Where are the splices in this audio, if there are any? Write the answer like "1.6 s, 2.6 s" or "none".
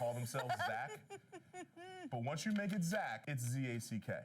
3.2 s